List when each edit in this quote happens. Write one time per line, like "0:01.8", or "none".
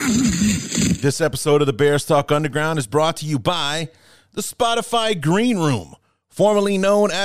0:01.0